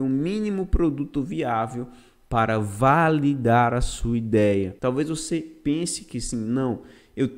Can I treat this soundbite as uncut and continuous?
no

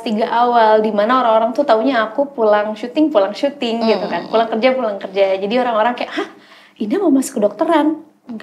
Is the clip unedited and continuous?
yes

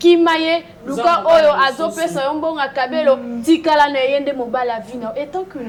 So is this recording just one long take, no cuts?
yes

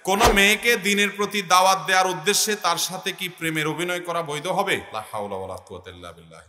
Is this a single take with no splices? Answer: no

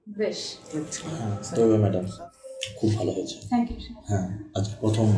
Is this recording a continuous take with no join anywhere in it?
no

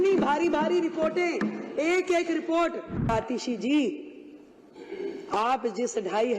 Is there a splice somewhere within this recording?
yes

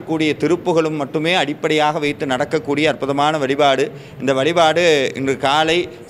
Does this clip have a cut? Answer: no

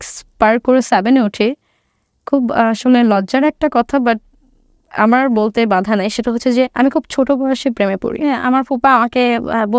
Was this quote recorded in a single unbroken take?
no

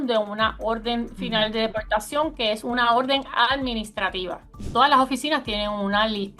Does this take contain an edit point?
yes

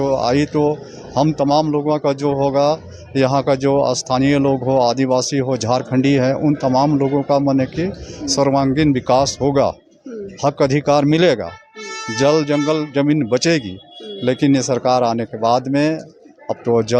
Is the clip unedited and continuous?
yes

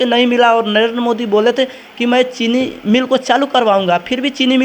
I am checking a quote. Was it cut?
no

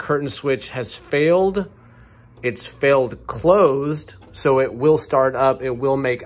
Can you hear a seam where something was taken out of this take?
no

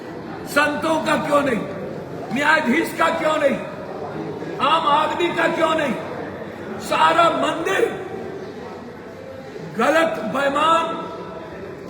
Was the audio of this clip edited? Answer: no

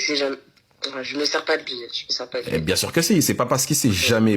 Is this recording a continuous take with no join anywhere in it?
yes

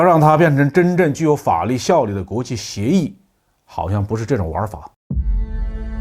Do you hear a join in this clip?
yes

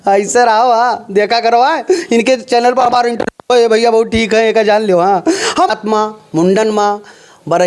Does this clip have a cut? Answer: yes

